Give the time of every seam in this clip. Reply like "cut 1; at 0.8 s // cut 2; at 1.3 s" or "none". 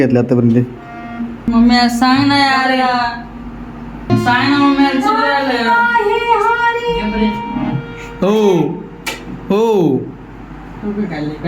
cut 1; at 1.5 s // cut 2; at 4.1 s

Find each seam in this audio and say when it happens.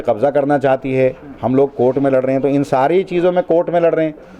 none

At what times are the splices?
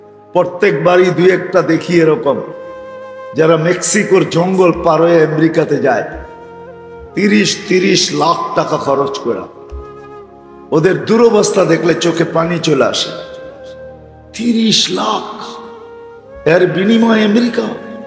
none

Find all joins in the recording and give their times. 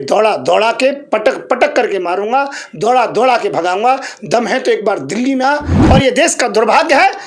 cut 1; at 5.7 s

